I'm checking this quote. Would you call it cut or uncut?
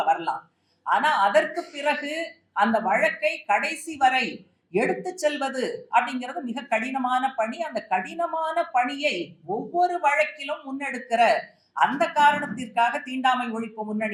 uncut